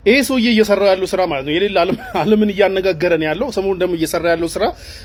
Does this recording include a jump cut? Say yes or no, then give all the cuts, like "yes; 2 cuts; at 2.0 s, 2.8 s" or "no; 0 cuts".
no; 0 cuts